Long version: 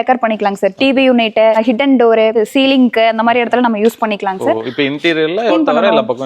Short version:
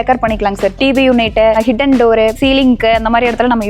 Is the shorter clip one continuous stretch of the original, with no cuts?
no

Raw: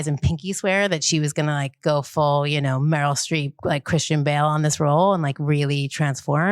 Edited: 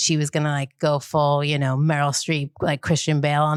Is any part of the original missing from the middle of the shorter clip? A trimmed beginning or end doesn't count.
no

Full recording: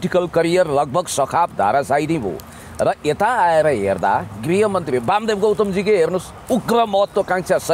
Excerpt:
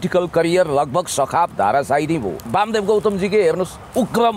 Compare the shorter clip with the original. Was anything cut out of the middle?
yes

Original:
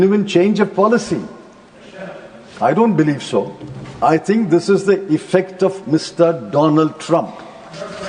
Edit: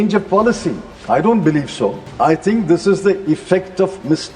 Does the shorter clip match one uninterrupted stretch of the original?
no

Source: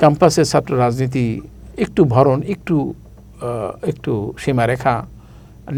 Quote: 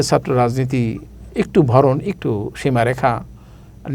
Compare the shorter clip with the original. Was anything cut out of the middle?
yes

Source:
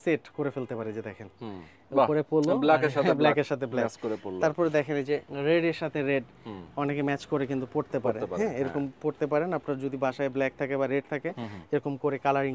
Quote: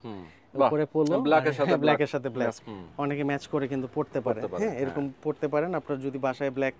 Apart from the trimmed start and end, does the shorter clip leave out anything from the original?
yes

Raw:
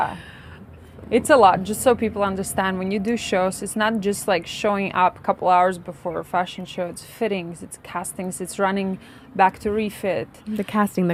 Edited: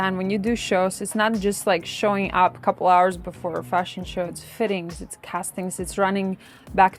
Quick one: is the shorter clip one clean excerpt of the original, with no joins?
yes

